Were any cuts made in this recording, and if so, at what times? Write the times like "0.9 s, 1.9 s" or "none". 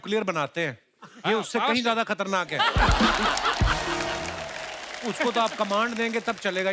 none